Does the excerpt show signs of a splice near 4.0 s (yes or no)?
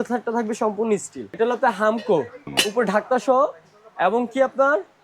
no